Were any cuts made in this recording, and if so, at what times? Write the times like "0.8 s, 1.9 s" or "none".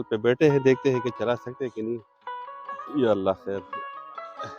3.6 s